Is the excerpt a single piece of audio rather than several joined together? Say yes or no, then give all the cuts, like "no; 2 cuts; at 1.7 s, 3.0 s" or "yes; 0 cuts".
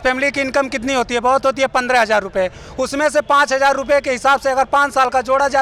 yes; 0 cuts